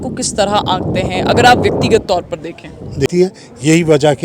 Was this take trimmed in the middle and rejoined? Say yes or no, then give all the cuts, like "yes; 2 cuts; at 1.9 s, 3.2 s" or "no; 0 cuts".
yes; 1 cut; at 3.1 s